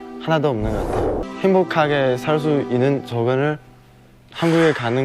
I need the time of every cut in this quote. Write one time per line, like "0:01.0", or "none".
0:01.3